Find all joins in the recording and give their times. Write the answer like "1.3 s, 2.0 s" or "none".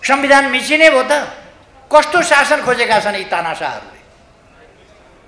none